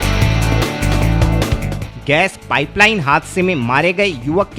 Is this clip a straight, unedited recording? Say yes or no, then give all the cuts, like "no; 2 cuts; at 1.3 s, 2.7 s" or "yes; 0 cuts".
no; 1 cut; at 1.8 s